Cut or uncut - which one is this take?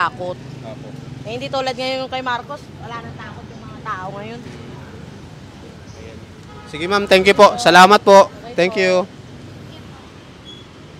uncut